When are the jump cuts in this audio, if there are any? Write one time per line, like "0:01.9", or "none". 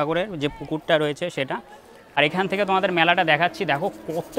0:02.0

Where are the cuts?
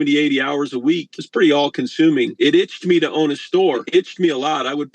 0:01.2
0:02.3
0:03.8

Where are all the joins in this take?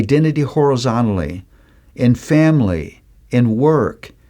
none

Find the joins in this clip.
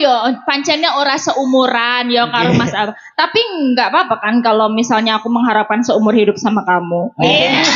none

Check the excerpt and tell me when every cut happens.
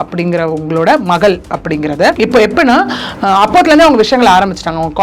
0:02.2

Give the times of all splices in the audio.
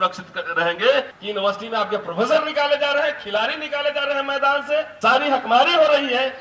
0:01.2
0:04.9

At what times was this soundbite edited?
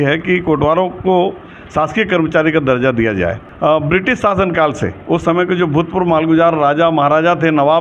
0:03.4

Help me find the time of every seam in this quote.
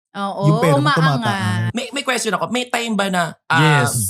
0:01.7

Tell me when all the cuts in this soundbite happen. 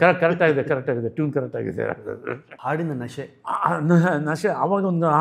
0:02.5

